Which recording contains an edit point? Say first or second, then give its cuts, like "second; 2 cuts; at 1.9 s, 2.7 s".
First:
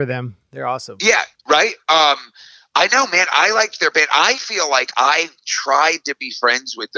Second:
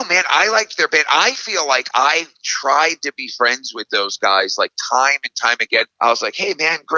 second; 1 cut; at 5.9 s